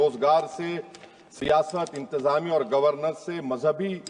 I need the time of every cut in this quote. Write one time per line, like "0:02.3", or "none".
none